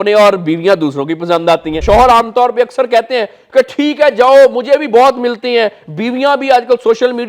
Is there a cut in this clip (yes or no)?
yes